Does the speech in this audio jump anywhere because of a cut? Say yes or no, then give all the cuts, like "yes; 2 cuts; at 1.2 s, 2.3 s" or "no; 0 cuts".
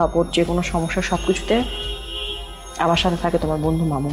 no; 0 cuts